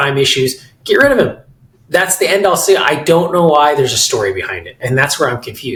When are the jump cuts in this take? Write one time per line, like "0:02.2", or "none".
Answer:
none